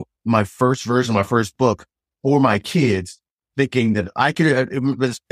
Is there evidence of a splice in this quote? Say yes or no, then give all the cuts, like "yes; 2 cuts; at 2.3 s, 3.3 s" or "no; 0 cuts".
no; 0 cuts